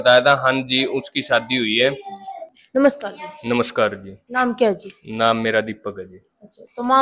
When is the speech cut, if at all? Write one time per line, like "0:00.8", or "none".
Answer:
0:02.6